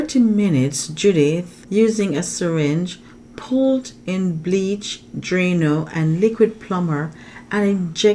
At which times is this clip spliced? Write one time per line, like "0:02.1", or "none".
0:01.5